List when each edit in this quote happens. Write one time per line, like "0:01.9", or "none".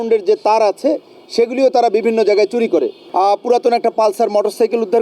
0:03.0